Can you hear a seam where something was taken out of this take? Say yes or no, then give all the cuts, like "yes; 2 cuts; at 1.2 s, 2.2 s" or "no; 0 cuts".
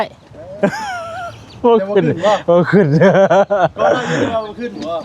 no; 0 cuts